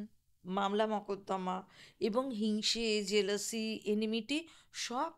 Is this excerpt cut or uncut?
uncut